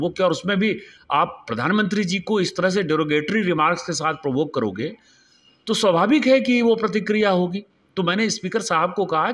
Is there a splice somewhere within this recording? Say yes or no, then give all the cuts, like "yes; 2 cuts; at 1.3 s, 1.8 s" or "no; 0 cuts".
no; 0 cuts